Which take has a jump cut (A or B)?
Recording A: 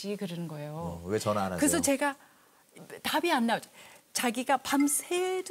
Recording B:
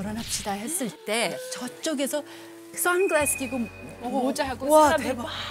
B